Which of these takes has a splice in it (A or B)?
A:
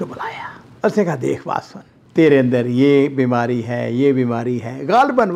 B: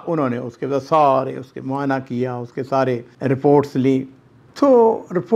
B